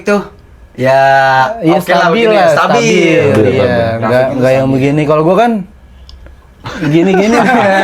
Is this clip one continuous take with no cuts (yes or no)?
yes